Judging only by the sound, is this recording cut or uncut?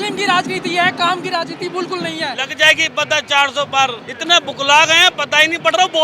cut